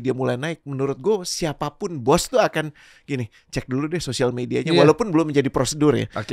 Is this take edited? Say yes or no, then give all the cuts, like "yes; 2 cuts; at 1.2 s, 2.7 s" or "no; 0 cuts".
no; 0 cuts